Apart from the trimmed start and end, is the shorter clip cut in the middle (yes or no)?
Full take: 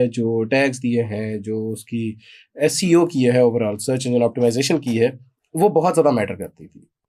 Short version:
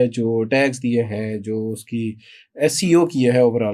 no